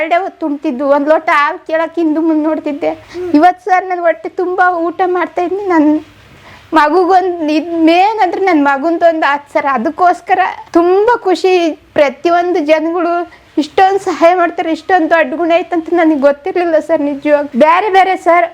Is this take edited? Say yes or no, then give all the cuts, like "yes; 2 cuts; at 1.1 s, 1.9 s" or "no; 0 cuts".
yes; 3 cuts; at 3.1 s, 10.6 s, 17.5 s